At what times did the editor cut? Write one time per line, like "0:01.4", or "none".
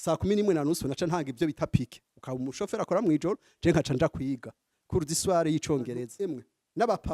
0:06.1